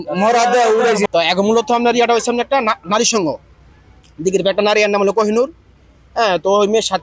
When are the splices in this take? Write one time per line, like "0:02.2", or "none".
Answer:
0:01.1